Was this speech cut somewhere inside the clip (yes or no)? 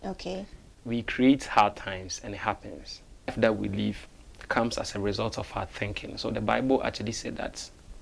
yes